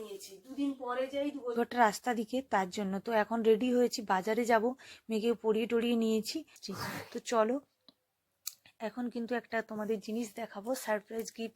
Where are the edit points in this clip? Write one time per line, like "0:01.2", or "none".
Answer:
0:01.6
0:06.6